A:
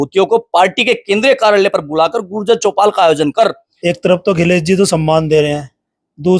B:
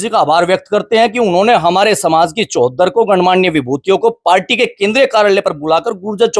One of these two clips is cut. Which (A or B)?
A